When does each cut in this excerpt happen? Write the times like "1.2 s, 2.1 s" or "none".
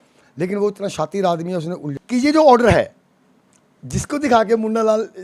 1.9 s